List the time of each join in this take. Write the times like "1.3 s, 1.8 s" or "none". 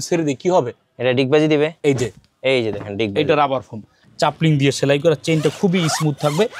4.0 s